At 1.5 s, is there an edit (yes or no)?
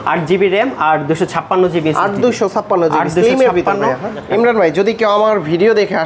no